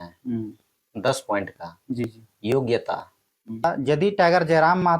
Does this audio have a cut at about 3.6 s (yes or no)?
yes